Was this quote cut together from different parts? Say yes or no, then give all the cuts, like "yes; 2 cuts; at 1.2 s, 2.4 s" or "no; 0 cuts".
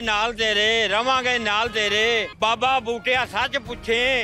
yes; 1 cut; at 2.3 s